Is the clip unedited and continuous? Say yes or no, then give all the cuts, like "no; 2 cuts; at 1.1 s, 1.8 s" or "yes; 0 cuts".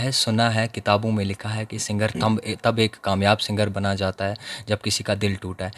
yes; 0 cuts